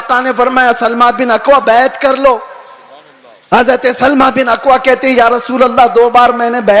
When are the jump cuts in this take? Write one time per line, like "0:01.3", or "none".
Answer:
none